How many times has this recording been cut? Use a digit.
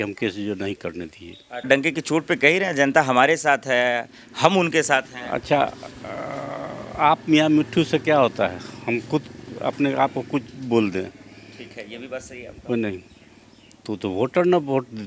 1